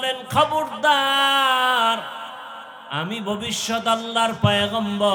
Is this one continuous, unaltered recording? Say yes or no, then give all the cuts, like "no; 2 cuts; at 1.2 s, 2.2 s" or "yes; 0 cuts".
yes; 0 cuts